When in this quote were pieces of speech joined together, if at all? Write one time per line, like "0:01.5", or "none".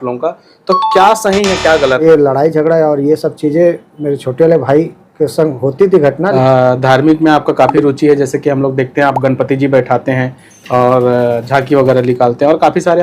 0:02.0
0:06.3